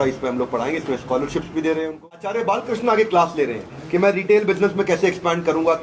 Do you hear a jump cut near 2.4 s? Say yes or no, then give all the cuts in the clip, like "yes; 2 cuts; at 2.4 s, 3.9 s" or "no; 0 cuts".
yes; 1 cut; at 2.4 s